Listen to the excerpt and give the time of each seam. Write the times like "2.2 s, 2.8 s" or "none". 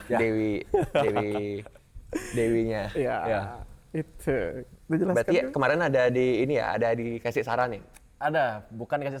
none